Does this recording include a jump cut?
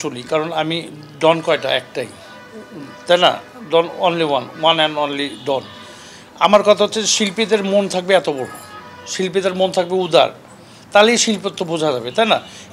no; 0 cuts

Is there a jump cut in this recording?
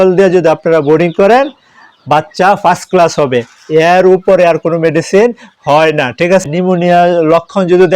yes; 1 cut; at 6.4 s

